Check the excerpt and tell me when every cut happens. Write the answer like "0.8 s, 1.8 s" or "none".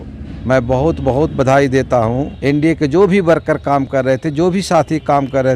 2.3 s